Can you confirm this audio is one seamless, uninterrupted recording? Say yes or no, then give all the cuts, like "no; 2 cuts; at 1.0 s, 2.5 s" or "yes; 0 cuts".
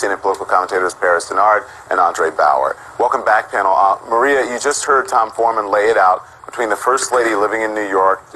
no; 1 cut; at 2.1 s